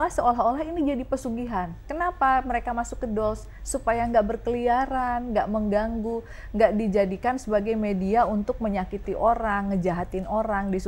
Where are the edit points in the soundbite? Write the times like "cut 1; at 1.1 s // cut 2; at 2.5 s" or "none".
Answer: cut 1; at 1.8 s